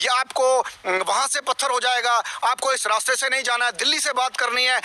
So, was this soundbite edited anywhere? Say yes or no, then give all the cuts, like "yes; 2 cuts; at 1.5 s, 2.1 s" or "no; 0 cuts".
no; 0 cuts